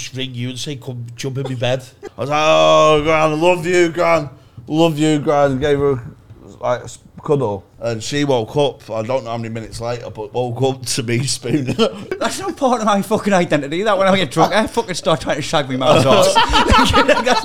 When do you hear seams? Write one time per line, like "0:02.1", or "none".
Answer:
0:02.0
0:07.7
0:12.1